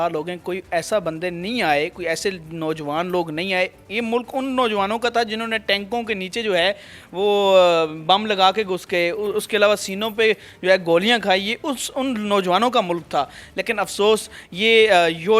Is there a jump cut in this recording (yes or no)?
no